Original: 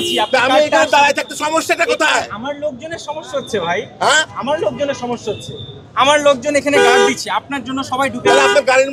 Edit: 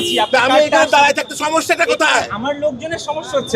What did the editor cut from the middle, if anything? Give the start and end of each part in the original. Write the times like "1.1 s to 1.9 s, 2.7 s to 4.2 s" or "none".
none